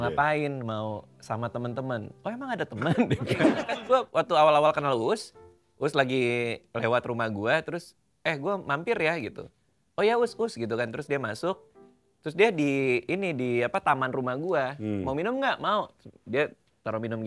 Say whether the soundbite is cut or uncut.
cut